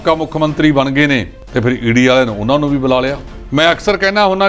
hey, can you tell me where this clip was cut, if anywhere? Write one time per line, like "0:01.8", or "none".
0:01.4
0:03.3